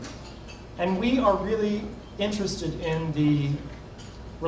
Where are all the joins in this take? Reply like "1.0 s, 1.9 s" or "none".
2.0 s

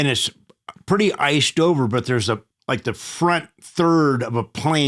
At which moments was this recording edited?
2.5 s

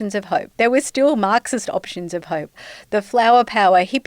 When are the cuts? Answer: 2.6 s

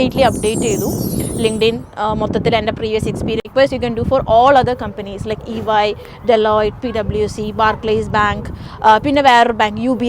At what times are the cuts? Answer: 3.5 s

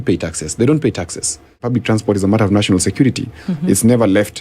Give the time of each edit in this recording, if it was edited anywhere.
1.6 s

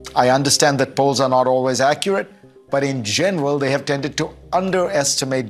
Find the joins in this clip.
0.9 s

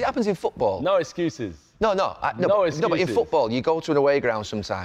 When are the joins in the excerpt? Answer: none

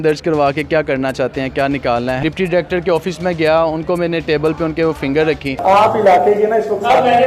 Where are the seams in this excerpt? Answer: 2.2 s, 5.5 s

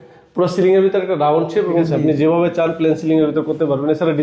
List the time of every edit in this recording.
1.9 s

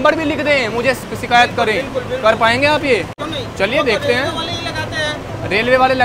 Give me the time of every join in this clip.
3.1 s

